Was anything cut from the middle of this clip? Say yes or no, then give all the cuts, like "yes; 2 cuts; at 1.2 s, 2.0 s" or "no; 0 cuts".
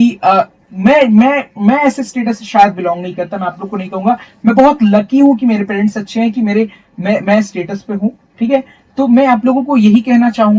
no; 0 cuts